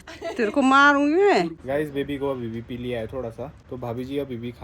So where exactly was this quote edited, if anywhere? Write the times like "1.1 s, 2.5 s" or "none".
1.6 s, 3.6 s